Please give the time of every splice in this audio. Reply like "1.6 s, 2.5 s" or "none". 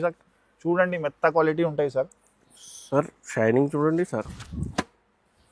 none